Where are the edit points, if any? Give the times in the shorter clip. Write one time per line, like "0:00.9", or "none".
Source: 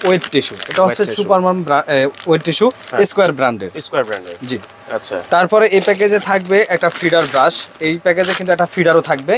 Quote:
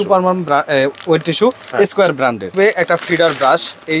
0:02.5